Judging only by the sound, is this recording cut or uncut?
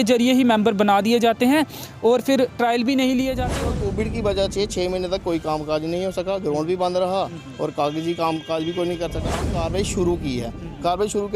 cut